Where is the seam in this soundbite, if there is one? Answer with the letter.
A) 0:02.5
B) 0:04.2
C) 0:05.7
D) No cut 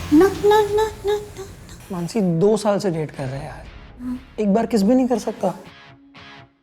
D